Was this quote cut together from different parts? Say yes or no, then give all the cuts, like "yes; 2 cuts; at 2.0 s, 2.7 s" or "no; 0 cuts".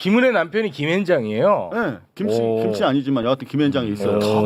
no; 0 cuts